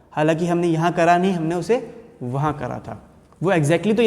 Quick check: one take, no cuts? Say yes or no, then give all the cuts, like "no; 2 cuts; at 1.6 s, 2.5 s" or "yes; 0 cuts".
yes; 0 cuts